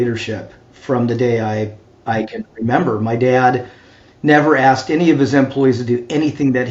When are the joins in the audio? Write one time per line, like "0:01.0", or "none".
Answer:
none